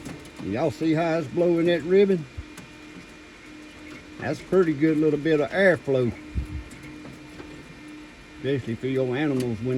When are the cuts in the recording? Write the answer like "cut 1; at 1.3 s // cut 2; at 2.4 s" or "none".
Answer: none